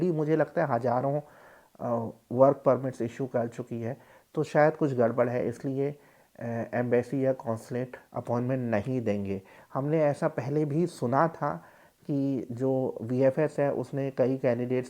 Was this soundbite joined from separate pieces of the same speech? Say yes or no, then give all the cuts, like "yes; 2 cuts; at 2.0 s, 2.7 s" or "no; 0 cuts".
no; 0 cuts